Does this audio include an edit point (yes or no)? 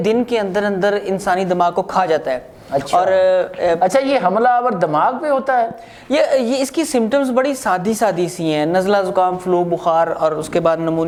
no